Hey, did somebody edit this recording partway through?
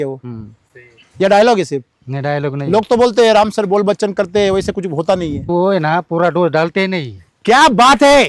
no; 0 cuts

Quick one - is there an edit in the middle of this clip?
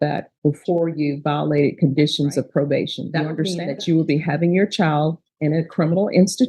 yes; 1 cut; at 3.6 s

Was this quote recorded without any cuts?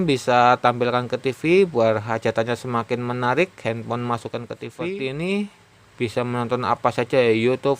no; 1 cut; at 4.8 s

